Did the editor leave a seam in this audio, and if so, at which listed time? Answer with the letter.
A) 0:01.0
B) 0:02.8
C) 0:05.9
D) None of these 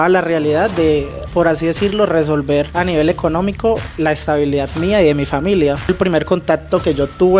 C